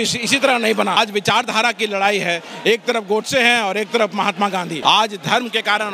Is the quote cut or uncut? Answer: cut